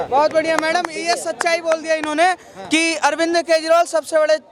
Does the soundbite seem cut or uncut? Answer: uncut